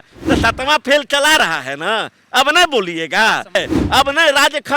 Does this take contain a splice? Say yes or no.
yes